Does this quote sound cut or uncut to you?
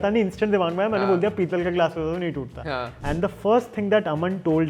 cut